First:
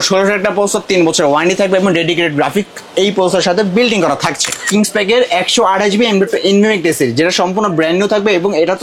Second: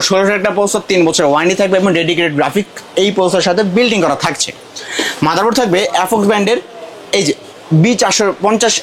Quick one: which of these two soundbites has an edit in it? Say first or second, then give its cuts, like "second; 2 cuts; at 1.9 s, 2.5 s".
first; 1 cut; at 4.7 s